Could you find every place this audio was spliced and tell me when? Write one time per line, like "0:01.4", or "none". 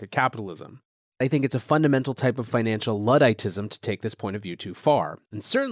0:01.2